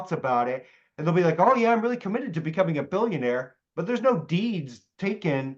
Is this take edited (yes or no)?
no